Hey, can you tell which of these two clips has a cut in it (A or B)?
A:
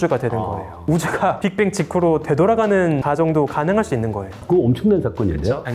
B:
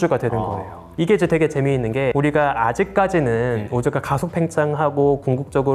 A